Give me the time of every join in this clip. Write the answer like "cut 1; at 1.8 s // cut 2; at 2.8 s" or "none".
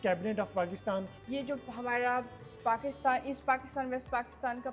cut 1; at 1.2 s